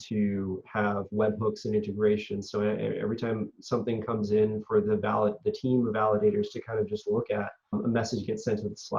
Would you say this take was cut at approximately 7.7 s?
yes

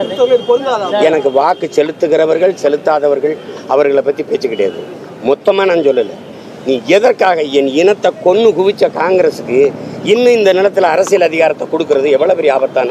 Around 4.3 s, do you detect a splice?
no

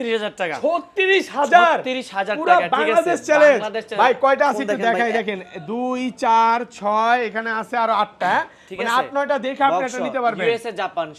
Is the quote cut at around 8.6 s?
no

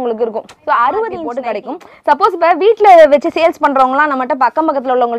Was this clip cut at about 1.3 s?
yes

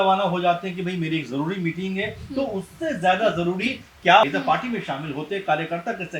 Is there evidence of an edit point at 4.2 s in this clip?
yes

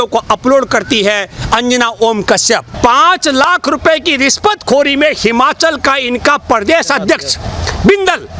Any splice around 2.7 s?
yes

